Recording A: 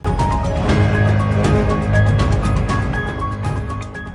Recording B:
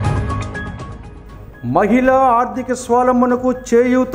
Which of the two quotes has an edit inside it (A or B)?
B